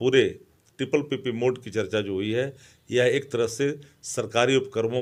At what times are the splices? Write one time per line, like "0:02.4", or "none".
none